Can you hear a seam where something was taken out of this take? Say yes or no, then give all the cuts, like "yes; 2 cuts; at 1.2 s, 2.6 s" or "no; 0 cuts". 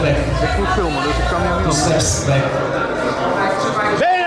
no; 0 cuts